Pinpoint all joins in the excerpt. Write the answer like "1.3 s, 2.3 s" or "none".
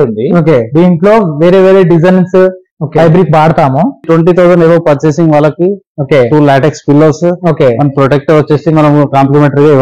4.1 s